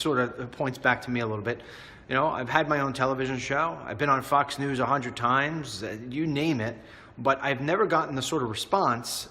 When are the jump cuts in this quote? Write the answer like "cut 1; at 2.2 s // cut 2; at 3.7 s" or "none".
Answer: cut 1; at 3.4 s